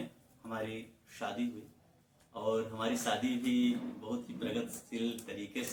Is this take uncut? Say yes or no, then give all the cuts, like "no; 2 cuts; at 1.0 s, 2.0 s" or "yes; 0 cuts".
yes; 0 cuts